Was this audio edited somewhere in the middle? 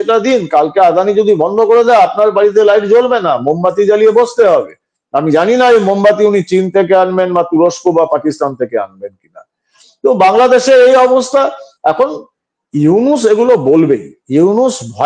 no; 0 cuts

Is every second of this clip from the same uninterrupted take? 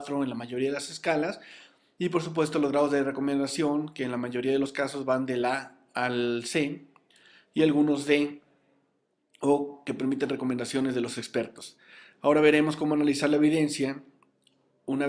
yes; 0 cuts

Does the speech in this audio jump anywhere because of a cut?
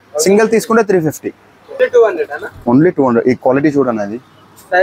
yes; 1 cut; at 1.8 s

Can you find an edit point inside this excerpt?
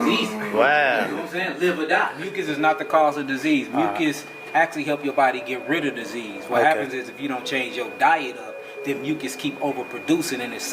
yes; 1 cut; at 2.3 s

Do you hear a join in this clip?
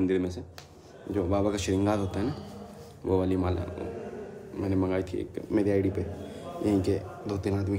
no; 0 cuts

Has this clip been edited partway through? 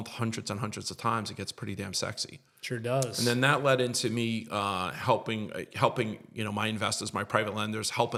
no; 0 cuts

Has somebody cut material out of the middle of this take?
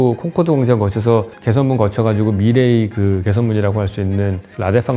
no; 0 cuts

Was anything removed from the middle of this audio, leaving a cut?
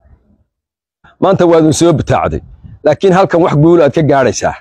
yes; 1 cut; at 1.1 s

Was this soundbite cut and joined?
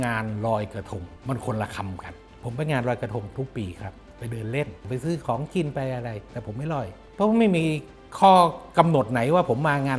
yes; 3 cuts; at 1.0 s, 2.3 s, 4.8 s

